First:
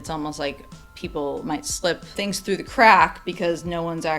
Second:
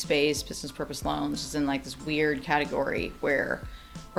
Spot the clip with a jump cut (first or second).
first